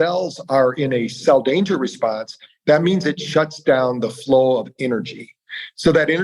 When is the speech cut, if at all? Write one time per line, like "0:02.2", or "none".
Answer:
0:01.1